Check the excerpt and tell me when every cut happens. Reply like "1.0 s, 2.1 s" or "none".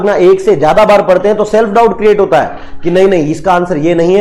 none